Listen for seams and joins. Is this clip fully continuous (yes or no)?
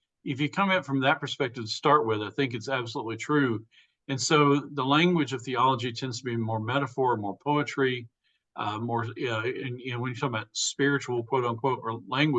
yes